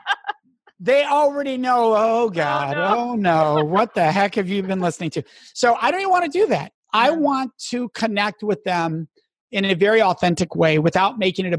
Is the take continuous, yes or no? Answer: yes